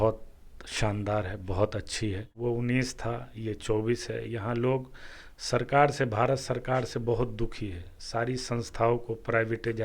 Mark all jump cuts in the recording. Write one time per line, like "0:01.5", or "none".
0:02.3

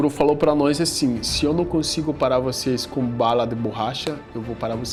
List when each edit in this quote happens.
none

